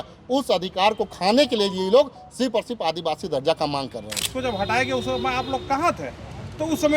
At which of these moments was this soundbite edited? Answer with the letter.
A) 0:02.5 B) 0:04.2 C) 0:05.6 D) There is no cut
B